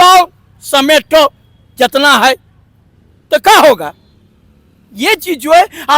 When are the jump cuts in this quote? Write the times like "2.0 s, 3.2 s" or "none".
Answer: none